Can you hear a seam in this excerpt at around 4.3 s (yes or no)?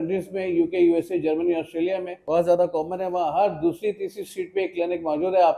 no